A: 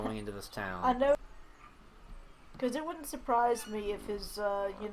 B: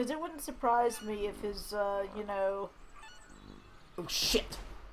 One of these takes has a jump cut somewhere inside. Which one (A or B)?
A